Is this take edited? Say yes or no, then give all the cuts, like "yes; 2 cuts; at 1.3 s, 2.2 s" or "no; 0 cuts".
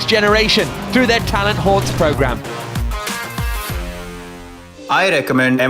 yes; 1 cut; at 4.7 s